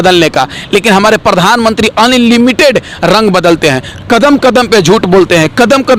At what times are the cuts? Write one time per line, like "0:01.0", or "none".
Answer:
none